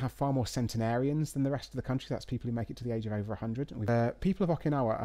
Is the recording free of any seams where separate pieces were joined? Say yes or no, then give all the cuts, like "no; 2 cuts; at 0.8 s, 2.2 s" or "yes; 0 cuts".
no; 1 cut; at 3.8 s